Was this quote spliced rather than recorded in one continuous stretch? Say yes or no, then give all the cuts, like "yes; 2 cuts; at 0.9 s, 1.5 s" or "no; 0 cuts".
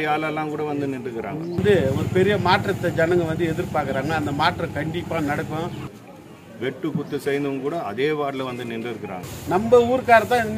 yes; 3 cuts; at 1.6 s, 6.1 s, 9.3 s